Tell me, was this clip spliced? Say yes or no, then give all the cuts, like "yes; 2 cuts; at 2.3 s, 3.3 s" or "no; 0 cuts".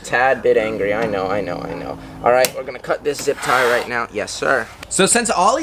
no; 0 cuts